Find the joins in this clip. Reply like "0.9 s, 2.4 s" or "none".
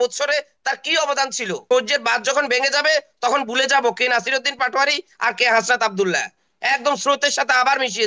1.6 s